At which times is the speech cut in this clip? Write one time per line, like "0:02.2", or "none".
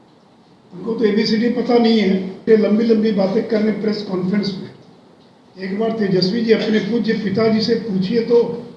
0:02.4